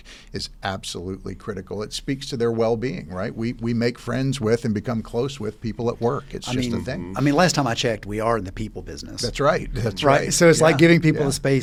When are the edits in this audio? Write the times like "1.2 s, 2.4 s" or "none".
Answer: none

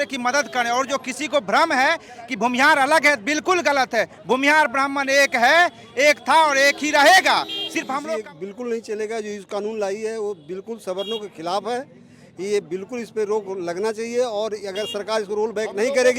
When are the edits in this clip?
8.0 s

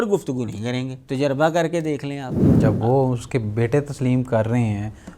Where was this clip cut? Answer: 1.0 s, 2.4 s

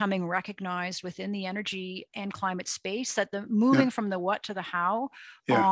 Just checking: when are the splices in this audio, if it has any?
2.1 s

